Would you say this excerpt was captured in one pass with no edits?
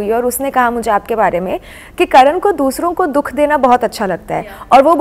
yes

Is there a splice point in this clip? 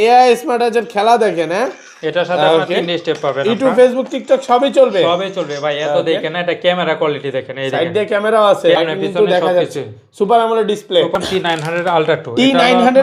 yes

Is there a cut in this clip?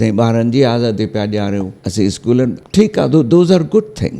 yes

